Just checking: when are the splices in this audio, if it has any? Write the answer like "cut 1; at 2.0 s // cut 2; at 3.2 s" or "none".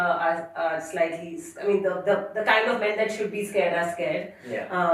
none